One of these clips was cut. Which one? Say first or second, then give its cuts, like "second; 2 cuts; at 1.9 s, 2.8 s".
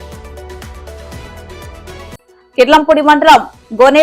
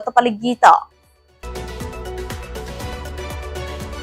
first; 1 cut; at 1.8 s